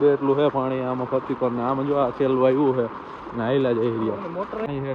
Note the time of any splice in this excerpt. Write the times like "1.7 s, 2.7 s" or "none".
none